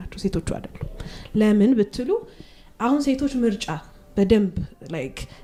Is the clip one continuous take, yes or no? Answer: yes